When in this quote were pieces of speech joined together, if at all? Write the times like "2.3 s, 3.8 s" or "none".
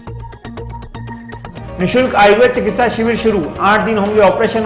none